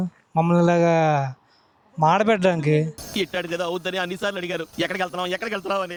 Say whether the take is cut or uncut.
uncut